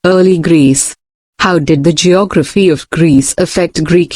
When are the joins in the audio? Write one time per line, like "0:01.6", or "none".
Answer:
0:01.3